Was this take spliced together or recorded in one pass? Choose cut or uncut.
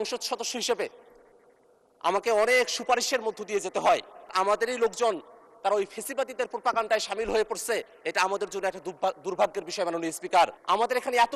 cut